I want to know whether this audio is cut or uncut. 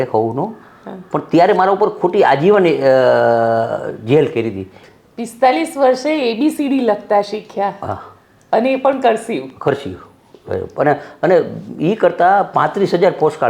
cut